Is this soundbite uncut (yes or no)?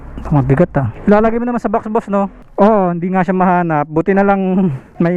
no